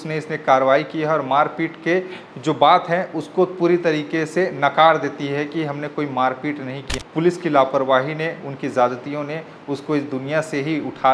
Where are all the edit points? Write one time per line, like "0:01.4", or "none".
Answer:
0:06.9